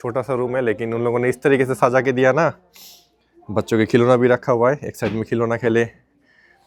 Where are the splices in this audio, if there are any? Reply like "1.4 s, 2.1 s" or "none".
none